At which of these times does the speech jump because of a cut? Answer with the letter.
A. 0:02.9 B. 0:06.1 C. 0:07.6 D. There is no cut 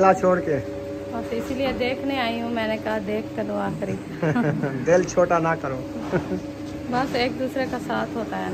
D